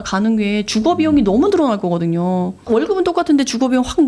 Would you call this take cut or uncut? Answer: cut